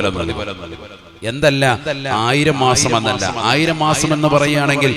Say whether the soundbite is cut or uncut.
uncut